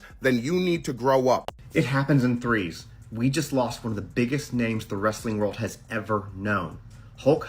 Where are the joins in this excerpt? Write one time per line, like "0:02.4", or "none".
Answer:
0:01.4